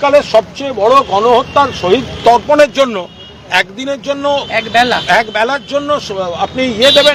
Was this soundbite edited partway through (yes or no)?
no